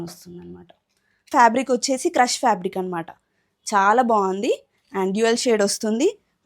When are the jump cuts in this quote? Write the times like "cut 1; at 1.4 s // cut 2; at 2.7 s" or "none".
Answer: cut 1; at 1.3 s